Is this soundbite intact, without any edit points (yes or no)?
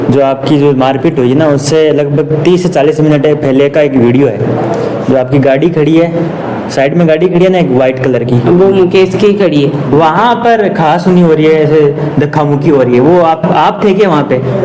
yes